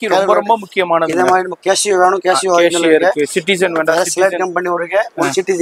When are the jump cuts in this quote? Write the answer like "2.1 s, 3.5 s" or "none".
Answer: none